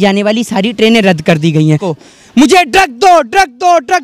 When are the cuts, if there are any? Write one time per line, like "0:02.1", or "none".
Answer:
0:01.9